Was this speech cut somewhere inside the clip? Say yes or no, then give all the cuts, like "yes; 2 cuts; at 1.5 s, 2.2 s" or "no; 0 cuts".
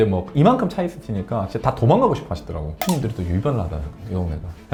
no; 0 cuts